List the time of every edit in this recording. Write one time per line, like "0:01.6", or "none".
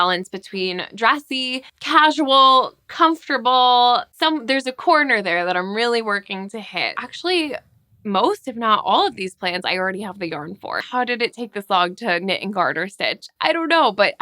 0:04.1
0:07.1
0:10.8